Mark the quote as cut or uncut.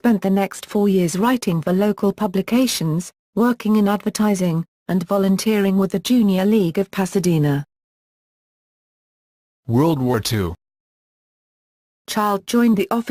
uncut